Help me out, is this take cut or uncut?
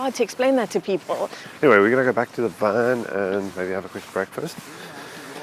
uncut